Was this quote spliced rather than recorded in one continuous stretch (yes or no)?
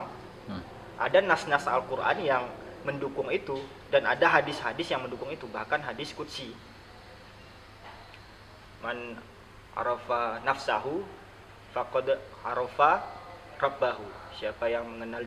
no